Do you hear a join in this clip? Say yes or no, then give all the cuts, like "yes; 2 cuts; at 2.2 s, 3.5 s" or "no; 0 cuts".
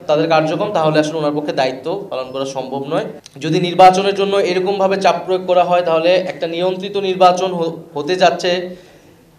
yes; 1 cut; at 3.2 s